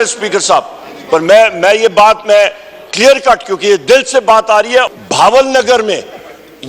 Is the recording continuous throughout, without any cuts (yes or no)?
no